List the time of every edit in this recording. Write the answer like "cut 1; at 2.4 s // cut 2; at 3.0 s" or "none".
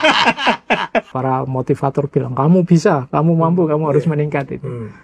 cut 1; at 1.1 s